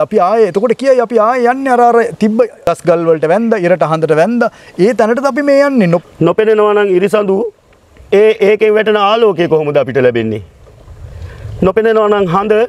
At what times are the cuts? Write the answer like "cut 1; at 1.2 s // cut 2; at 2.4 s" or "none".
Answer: cut 1; at 2.6 s // cut 2; at 6.0 s